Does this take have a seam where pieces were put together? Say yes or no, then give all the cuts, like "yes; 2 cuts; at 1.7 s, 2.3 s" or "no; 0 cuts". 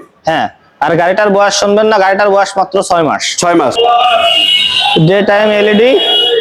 yes; 1 cut; at 3.7 s